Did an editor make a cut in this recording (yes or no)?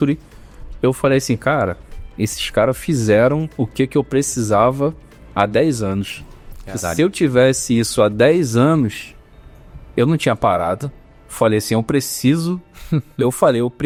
no